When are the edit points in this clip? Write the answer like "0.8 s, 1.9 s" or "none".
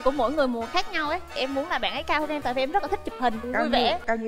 1.4 s